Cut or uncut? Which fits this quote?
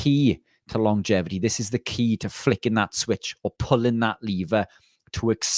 uncut